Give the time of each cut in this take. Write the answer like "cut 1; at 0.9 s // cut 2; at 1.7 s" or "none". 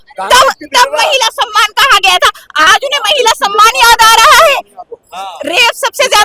cut 1; at 2.7 s